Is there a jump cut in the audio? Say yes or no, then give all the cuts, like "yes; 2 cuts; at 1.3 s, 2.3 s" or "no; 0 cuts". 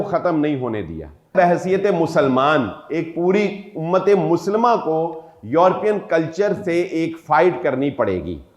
yes; 1 cut; at 1.3 s